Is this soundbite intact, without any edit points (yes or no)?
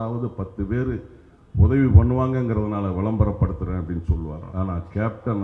no